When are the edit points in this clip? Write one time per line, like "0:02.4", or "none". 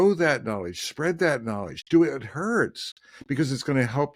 none